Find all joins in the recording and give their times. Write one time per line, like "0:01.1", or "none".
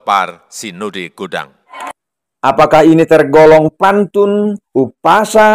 0:01.6